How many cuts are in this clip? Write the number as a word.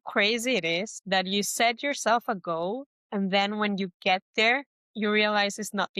three